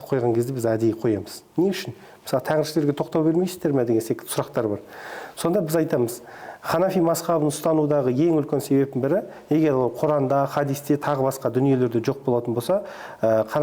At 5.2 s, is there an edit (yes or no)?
no